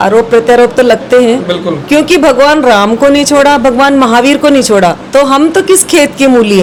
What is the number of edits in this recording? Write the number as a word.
zero